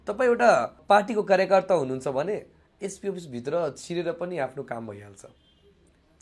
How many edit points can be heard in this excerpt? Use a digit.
0